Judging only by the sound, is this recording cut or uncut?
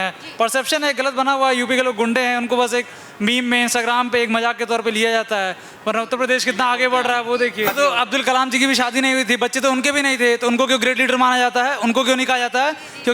cut